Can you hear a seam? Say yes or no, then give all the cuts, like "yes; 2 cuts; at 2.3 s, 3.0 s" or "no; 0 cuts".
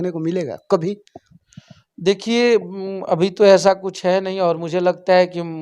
no; 0 cuts